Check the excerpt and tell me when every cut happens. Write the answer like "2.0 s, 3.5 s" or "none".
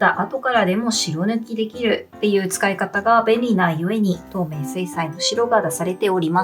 4.3 s